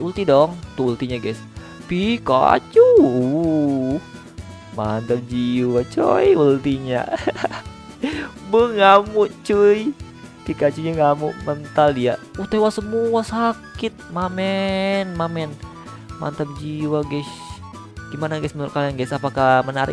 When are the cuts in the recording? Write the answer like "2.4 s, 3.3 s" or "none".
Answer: none